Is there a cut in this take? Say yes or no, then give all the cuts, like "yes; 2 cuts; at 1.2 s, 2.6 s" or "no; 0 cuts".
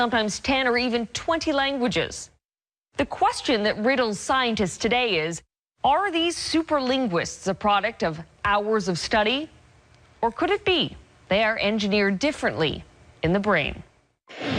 yes; 1 cut; at 6.3 s